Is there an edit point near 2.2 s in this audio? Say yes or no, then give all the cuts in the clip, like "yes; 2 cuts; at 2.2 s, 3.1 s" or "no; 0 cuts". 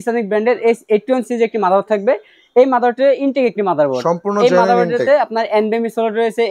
no; 0 cuts